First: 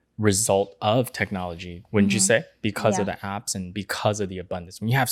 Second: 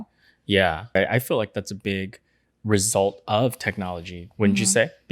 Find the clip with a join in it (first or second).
second